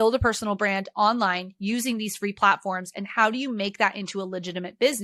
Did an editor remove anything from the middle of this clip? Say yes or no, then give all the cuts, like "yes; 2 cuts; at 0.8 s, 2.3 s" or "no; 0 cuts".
no; 0 cuts